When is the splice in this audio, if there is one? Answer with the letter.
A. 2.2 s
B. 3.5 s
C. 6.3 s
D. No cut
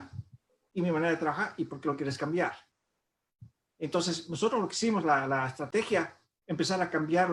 D